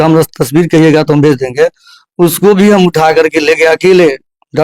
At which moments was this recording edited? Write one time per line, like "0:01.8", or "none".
none